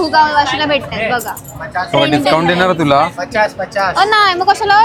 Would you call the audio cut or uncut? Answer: uncut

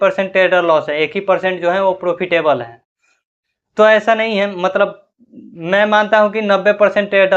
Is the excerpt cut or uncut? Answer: uncut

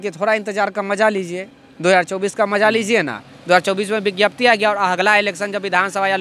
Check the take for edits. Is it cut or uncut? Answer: uncut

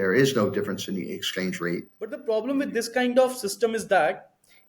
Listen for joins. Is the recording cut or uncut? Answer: cut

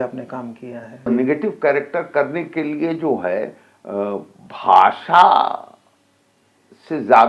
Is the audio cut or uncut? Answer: cut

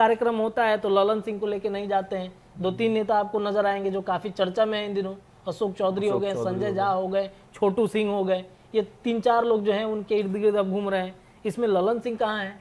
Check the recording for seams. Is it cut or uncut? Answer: uncut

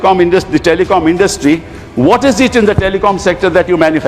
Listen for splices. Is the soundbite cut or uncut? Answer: uncut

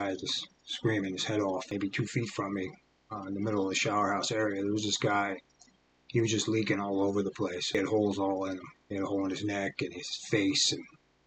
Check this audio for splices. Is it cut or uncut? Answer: cut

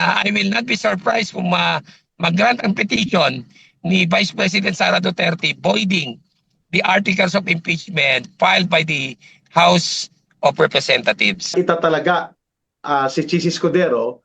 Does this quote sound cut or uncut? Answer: cut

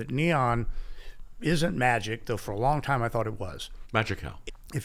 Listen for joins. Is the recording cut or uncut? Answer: uncut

